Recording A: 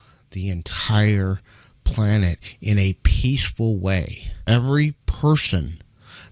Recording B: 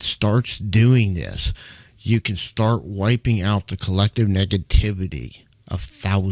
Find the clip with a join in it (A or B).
A